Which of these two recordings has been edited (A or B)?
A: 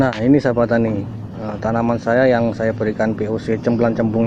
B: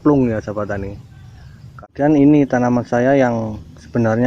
B